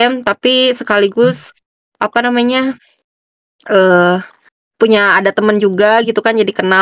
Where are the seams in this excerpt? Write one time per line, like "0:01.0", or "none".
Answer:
none